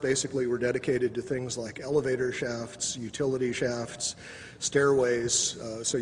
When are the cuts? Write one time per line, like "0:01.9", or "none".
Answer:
none